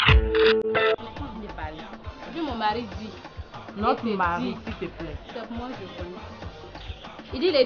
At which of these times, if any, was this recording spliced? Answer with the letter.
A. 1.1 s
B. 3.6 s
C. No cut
A